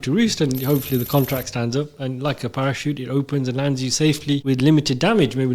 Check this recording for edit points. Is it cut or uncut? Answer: cut